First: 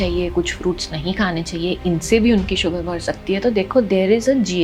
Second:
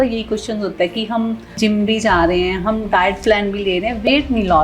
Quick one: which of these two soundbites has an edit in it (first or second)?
second